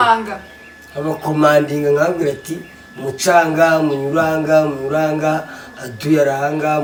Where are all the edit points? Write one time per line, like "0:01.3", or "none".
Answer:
none